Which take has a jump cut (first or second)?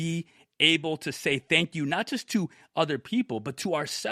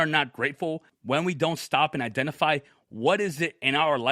second